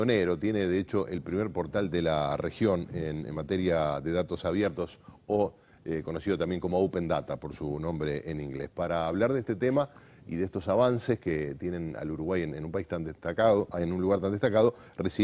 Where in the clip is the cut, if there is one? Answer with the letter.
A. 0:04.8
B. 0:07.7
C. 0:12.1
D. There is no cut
A